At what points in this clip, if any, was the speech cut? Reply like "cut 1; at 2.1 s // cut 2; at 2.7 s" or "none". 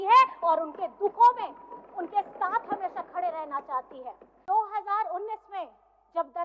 cut 1; at 4.4 s